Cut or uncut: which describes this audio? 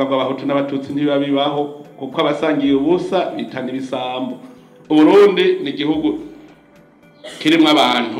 cut